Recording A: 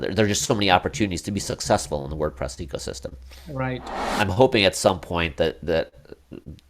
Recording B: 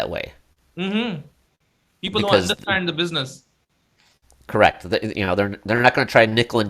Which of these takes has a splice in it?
A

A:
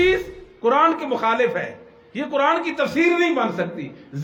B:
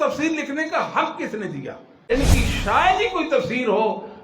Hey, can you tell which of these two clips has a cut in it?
B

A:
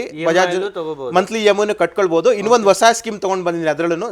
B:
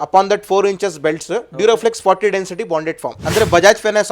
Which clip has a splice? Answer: B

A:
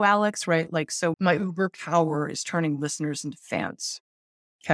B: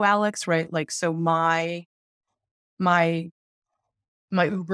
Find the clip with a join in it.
A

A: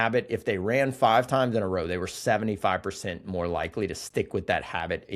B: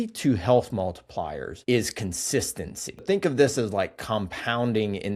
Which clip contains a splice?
B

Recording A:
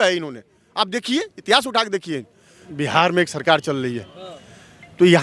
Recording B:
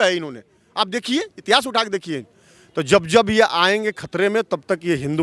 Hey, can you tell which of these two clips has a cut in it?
A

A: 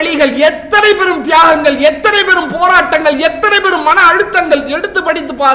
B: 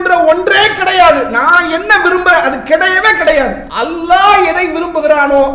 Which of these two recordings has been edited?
B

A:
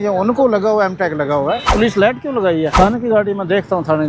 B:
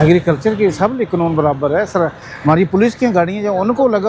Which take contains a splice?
A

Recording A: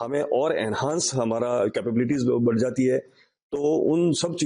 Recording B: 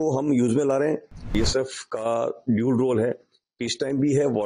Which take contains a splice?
B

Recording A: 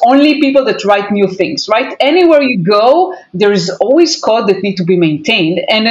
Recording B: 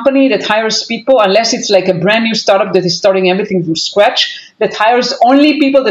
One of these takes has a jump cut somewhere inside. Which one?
A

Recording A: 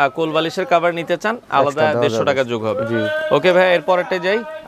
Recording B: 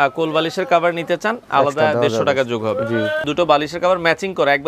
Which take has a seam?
B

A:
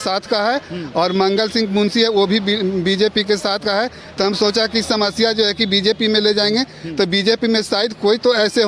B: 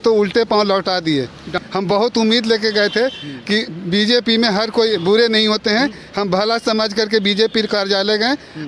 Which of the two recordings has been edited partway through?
B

